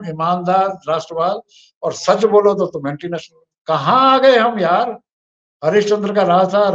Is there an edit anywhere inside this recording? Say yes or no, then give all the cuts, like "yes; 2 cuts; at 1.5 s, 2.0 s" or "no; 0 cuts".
no; 0 cuts